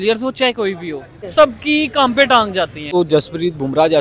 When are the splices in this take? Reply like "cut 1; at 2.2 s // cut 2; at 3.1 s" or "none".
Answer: cut 1; at 1.2 s // cut 2; at 2.8 s